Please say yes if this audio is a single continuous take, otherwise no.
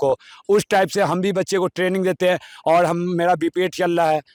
yes